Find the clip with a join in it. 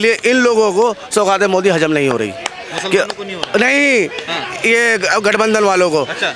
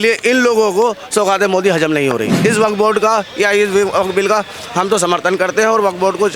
second; 1 cut; at 2.3 s

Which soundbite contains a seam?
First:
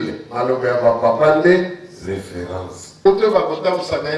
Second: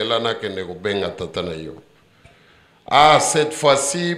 first; 1 cut; at 3.1 s

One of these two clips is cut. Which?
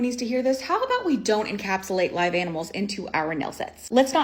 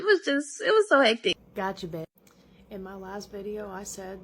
second; 1 cut; at 1.4 s

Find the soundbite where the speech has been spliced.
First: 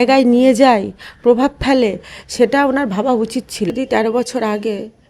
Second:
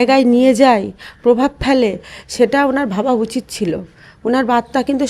first; 1 cut; at 3.7 s

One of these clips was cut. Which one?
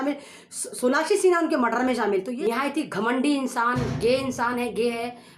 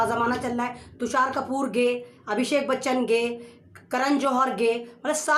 first; 1 cut; at 2.3 s

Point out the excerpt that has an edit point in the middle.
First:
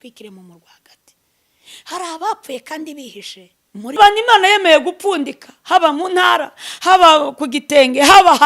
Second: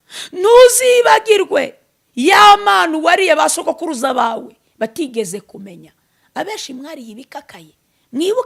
first; 1 cut; at 4.0 s

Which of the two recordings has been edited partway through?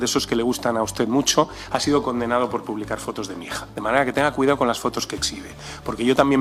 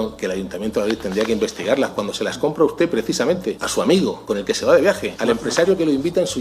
second; 3 cuts; at 3.6 s, 4.2 s, 5.1 s

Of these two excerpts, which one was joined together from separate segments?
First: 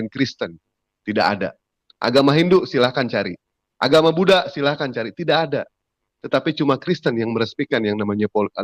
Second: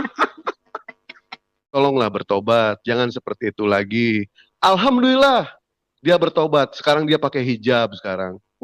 second; 1 cut; at 1.8 s

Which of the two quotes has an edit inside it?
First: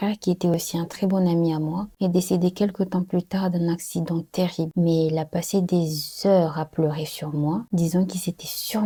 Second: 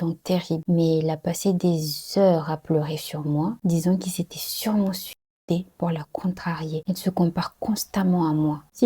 second; 1 cut; at 6.8 s

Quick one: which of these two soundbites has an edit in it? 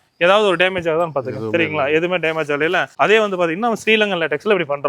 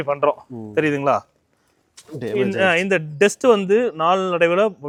first; 1 cut; at 2.9 s

